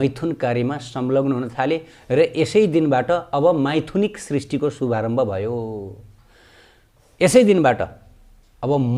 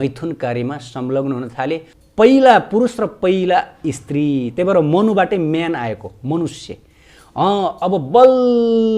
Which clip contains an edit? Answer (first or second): second